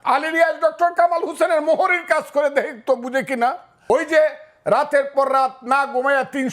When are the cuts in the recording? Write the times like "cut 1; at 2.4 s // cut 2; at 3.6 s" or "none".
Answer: cut 1; at 3.7 s